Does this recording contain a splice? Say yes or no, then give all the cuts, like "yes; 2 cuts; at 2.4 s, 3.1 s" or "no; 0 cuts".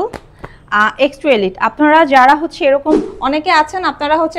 yes; 1 cut; at 3.1 s